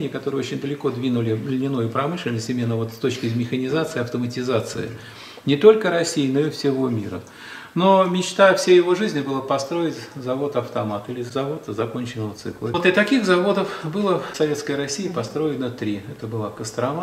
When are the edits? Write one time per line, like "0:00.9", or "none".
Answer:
0:11.3
0:12.7
0:14.3